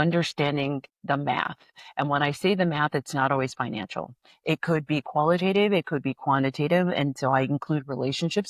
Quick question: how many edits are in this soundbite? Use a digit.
1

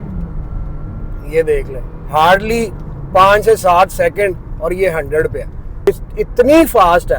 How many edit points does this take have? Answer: 1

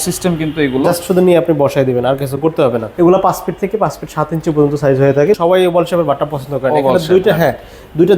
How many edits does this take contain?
2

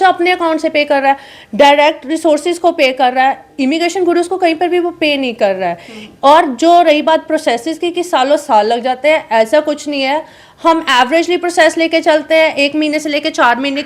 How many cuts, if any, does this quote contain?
0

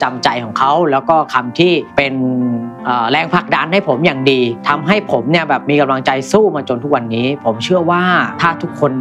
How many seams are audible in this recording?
0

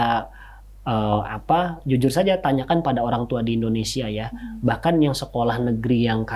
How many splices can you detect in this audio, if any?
0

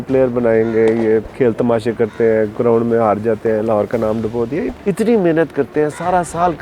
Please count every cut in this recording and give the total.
2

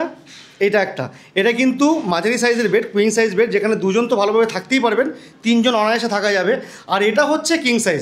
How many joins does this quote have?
0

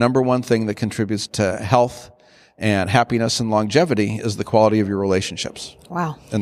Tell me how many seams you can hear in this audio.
1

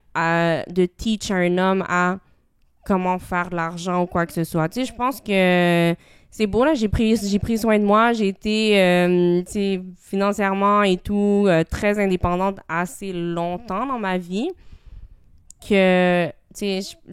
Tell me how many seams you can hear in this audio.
0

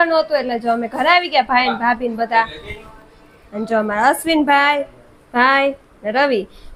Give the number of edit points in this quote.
0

